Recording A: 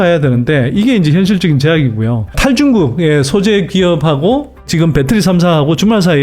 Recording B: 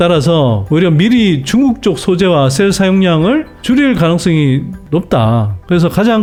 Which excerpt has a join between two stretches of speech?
A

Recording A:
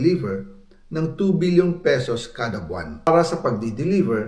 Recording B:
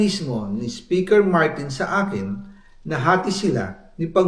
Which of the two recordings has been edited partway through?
A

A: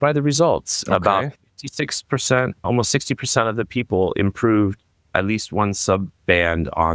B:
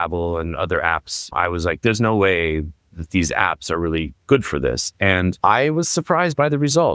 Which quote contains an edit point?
B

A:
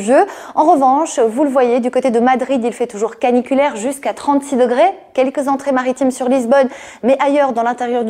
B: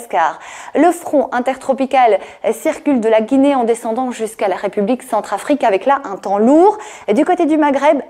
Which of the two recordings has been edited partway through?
A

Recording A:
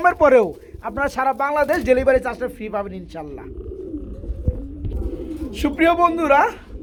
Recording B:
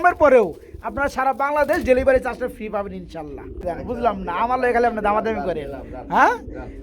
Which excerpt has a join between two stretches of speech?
B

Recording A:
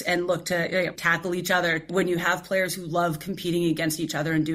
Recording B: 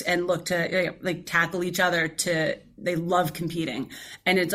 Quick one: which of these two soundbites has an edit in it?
A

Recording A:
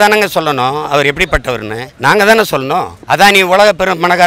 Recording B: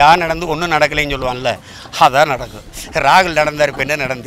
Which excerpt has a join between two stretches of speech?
A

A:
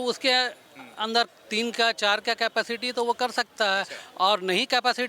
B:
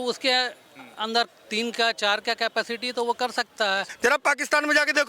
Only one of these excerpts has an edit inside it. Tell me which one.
B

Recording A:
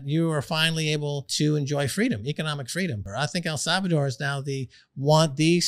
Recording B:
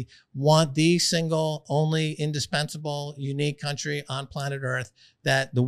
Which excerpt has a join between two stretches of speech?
A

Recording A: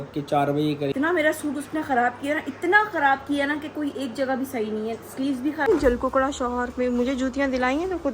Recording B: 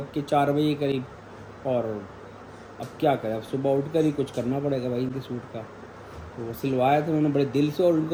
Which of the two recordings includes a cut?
A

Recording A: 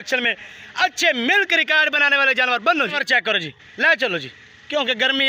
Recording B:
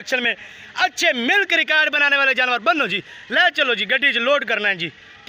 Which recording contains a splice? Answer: A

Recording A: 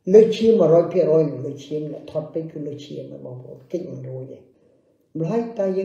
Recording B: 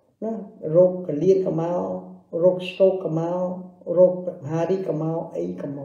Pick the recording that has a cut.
A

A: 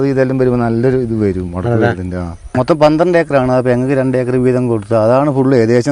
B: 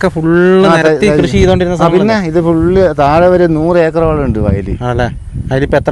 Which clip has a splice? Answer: A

